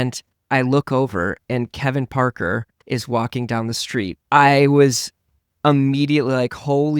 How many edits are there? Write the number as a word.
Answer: one